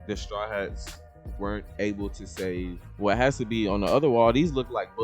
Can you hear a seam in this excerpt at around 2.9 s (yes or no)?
yes